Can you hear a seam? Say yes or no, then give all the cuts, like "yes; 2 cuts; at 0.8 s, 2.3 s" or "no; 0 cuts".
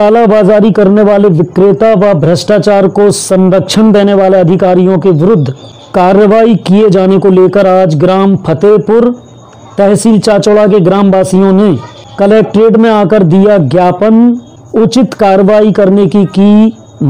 no; 0 cuts